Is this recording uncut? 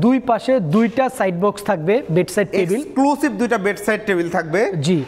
yes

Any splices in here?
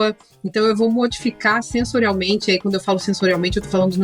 no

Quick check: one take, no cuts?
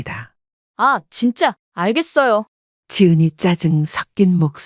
no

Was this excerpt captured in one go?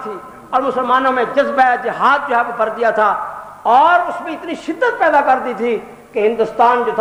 yes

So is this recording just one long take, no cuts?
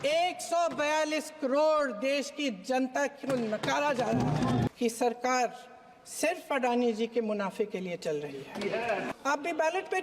no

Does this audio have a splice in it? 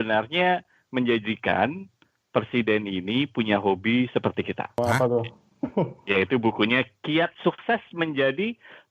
no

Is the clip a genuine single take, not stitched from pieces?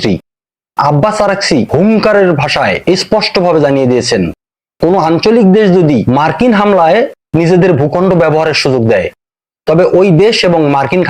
no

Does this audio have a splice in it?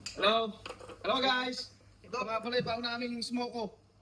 no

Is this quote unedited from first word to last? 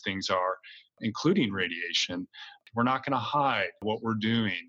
no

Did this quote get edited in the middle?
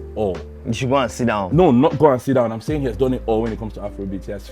no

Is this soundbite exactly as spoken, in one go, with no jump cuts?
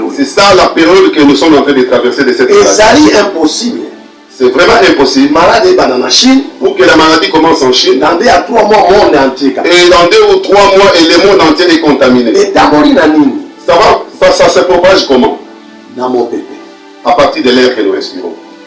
yes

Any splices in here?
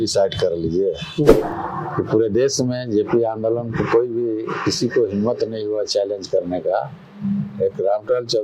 yes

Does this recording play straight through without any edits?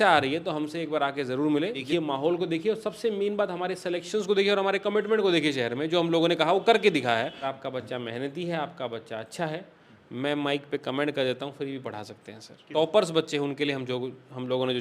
no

